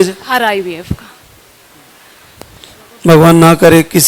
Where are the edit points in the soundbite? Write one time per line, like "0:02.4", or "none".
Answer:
none

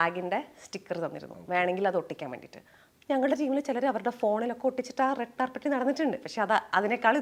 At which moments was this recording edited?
none

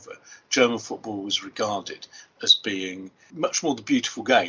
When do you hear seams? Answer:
0:03.2

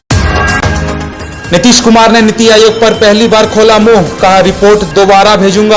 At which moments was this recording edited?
none

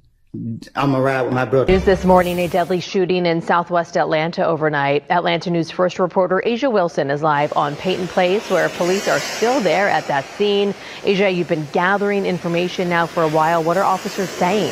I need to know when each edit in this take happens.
0:01.7

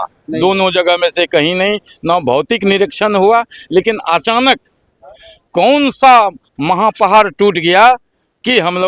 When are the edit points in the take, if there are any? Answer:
none

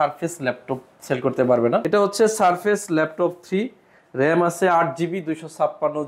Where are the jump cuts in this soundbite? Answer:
0:01.8

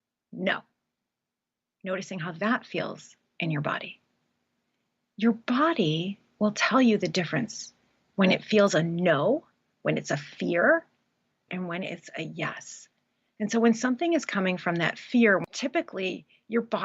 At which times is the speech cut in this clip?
0:11.5
0:15.4

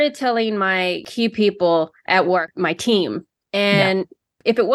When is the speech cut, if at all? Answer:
0:01.0
0:02.0

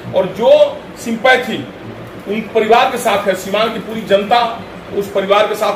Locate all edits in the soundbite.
none

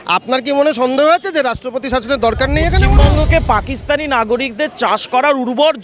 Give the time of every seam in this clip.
0:02.8

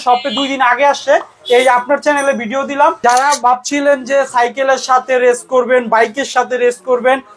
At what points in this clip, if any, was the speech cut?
0:03.1

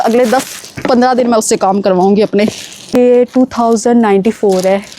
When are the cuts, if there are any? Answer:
0:02.9

